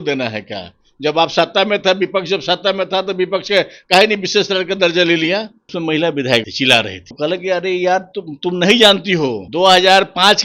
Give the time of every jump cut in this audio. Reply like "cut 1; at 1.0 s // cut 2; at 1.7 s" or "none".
cut 1; at 5.7 s // cut 2; at 6.5 s // cut 3; at 9.4 s

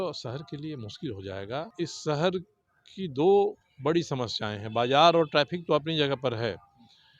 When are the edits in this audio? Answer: cut 1; at 1.7 s

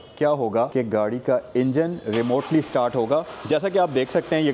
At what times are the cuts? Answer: none

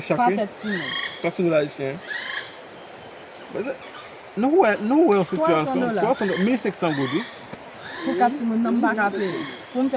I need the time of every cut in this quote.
none

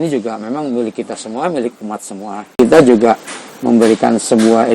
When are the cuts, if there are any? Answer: cut 1; at 2.6 s

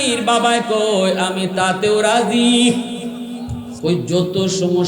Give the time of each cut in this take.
cut 1; at 3.6 s

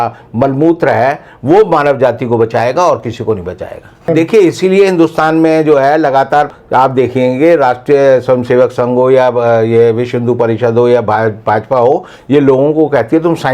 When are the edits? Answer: cut 1; at 4.1 s

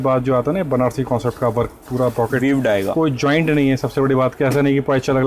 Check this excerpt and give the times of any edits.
none

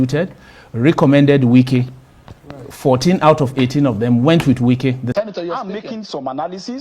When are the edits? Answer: cut 1; at 5.1 s

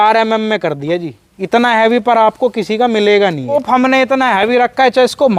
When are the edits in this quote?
cut 1; at 3.6 s

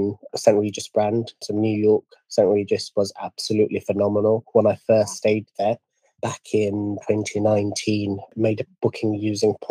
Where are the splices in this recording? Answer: cut 1; at 8.3 s

